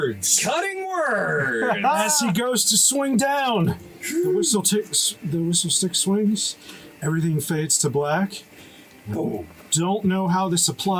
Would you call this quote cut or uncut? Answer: uncut